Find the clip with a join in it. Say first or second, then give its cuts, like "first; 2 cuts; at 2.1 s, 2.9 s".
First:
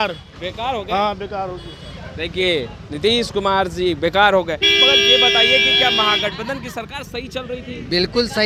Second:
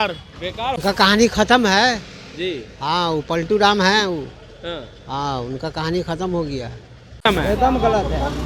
second; 2 cuts; at 0.8 s, 7.3 s